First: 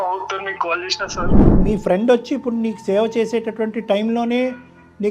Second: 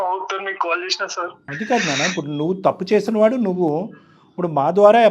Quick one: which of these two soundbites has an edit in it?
first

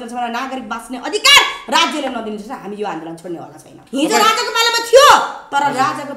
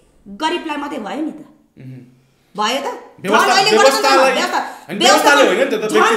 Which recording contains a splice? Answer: first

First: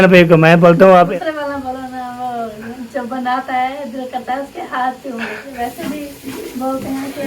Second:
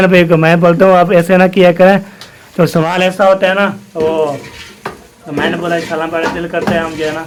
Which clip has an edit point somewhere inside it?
first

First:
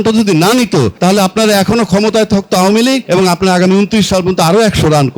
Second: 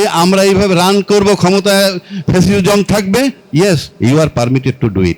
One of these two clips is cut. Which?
first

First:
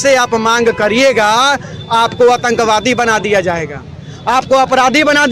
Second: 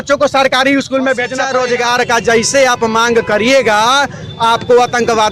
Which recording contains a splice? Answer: second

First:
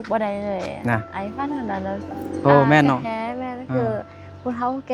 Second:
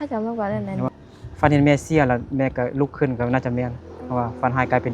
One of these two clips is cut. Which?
second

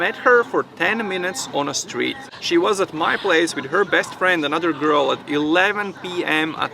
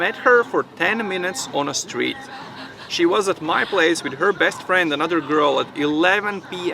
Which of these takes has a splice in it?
first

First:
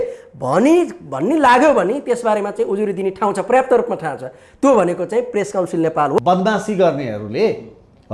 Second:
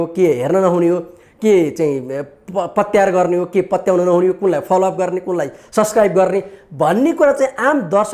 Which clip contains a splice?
first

